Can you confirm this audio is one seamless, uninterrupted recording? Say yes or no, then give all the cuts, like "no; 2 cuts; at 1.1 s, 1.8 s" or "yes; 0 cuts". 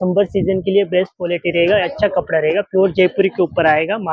yes; 0 cuts